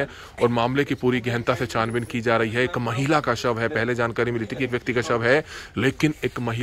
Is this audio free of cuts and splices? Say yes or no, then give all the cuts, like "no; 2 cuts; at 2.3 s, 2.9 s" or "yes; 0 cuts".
yes; 0 cuts